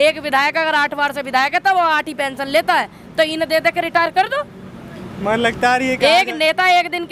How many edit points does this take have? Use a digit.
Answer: 0